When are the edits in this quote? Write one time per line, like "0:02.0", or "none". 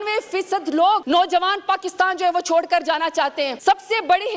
0:01.0
0:03.6